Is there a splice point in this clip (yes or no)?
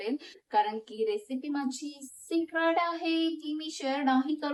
no